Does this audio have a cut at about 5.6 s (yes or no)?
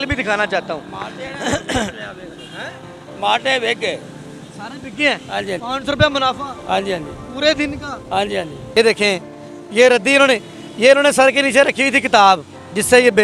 yes